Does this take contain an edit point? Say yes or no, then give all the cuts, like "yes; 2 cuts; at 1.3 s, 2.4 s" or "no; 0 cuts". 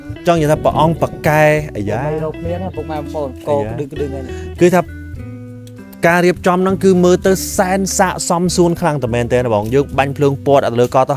no; 0 cuts